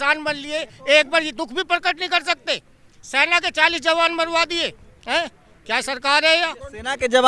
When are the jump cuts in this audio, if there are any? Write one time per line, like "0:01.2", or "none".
none